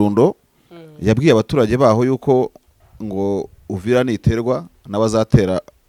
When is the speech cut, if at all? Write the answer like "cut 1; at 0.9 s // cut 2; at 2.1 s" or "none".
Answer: none